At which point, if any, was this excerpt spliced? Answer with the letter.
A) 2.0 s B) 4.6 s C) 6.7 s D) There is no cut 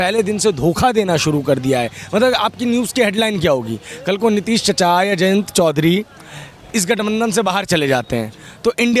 D